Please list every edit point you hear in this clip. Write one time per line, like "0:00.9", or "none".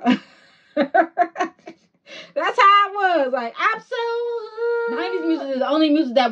0:05.2